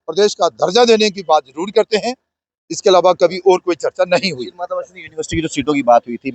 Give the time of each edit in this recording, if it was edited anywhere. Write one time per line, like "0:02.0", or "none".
none